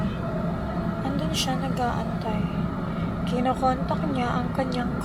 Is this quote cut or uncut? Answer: uncut